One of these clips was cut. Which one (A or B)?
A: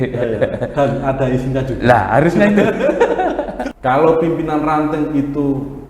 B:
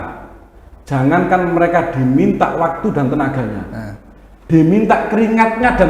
A